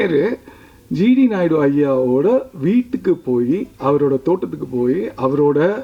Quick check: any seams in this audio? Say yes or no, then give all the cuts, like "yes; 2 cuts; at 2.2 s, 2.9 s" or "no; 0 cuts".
no; 0 cuts